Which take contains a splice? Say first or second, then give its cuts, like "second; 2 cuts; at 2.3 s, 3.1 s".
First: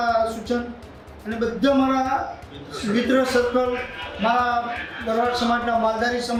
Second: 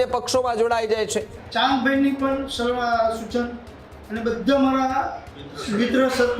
second; 1 cut; at 1.4 s